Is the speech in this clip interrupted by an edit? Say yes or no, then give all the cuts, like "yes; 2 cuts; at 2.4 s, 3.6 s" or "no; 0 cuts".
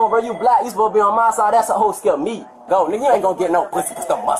yes; 1 cut; at 2.7 s